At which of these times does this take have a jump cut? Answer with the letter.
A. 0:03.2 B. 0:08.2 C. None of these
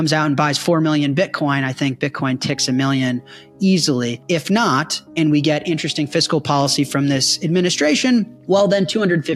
C